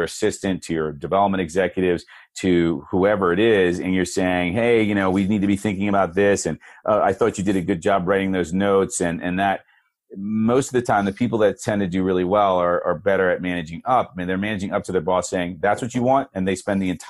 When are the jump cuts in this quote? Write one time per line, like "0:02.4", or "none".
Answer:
none